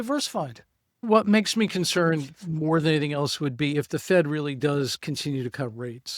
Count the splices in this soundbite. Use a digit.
1